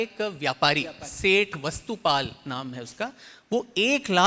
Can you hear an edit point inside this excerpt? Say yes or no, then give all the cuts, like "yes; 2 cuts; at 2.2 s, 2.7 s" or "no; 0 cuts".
no; 0 cuts